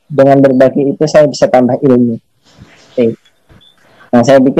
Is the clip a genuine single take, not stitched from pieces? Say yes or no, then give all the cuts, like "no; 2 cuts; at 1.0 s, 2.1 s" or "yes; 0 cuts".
no; 1 cut; at 2.9 s